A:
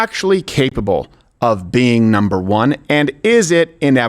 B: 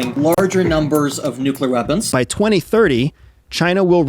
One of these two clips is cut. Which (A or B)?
B